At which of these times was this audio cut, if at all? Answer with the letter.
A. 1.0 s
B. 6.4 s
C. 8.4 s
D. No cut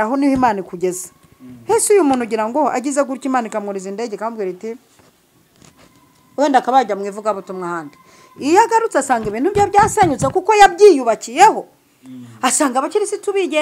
D